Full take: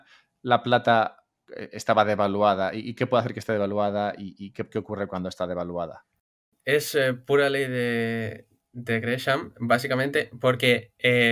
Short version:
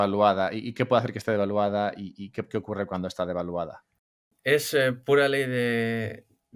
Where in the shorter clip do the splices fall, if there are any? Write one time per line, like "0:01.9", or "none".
none